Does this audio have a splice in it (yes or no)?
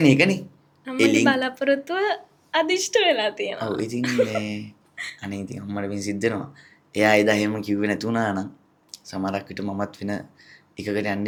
no